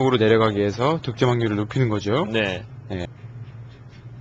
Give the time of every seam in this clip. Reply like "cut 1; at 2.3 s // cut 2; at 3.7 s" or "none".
cut 1; at 3.1 s